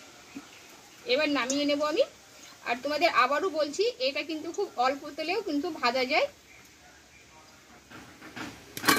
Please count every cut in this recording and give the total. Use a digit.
1